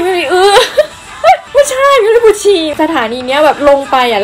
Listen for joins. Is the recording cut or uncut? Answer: cut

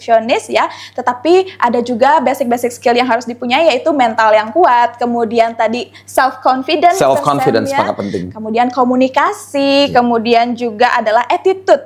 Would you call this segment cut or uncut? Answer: uncut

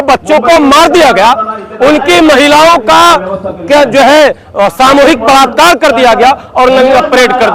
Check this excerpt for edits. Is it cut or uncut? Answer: uncut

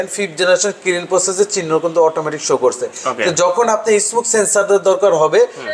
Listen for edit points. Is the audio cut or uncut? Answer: uncut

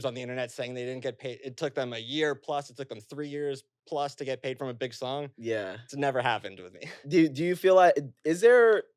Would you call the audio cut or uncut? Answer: uncut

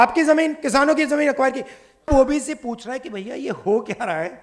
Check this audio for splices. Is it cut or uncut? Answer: cut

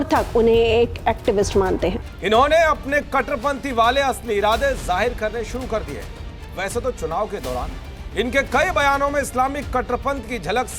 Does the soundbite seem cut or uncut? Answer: cut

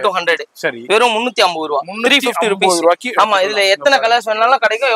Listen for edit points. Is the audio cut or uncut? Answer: uncut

